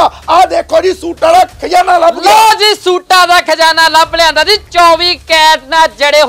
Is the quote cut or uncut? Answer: uncut